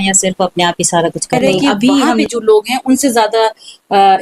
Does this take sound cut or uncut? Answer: cut